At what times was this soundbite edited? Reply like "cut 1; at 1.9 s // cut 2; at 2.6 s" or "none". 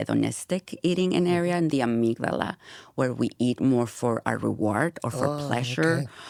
none